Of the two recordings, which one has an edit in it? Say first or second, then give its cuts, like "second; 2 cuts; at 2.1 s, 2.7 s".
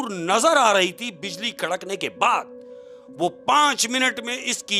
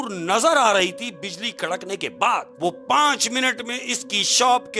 second; 1 cut; at 2.5 s